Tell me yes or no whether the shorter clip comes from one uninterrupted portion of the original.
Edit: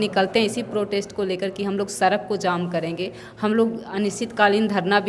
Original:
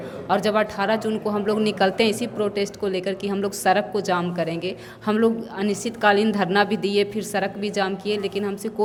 yes